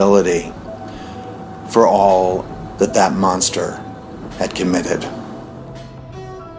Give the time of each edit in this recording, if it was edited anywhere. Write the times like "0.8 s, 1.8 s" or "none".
2.4 s, 5.3 s